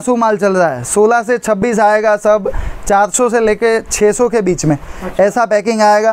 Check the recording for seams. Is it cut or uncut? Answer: uncut